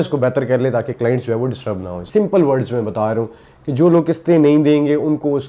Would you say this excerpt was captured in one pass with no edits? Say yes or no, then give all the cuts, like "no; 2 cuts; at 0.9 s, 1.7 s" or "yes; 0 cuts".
no; 1 cut; at 2.0 s